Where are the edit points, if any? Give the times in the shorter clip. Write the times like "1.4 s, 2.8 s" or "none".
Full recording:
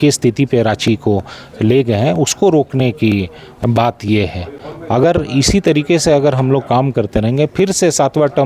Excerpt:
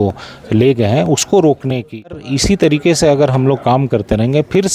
2.3 s